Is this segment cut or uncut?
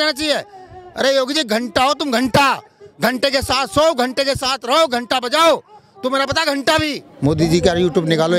cut